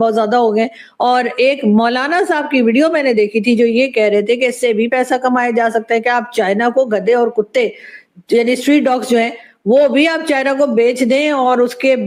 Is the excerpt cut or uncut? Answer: uncut